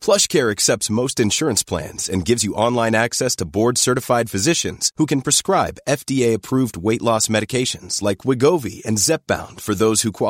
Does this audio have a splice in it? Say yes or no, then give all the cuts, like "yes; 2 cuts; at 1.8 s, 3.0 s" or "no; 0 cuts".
no; 0 cuts